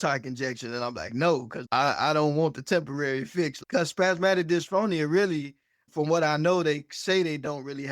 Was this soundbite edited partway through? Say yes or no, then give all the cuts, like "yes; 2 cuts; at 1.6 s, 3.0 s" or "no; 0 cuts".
no; 0 cuts